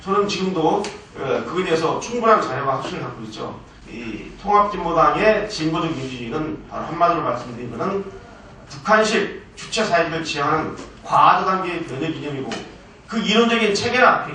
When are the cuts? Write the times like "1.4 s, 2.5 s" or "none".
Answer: 3.7 s